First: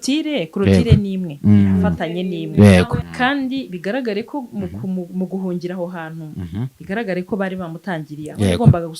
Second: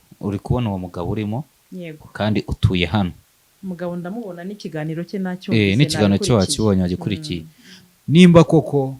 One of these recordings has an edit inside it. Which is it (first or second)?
first